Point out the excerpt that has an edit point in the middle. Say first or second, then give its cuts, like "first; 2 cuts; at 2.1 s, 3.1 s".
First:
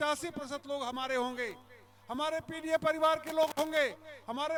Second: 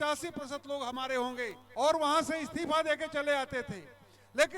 second; 1 cut; at 1.6 s